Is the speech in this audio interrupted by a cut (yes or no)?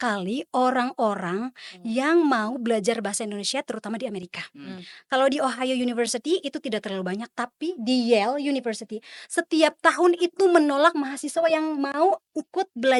no